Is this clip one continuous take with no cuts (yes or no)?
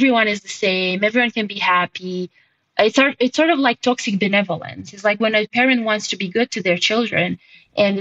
no